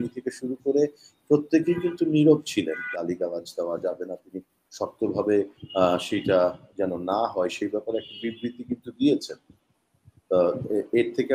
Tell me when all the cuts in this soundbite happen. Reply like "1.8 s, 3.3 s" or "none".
2.8 s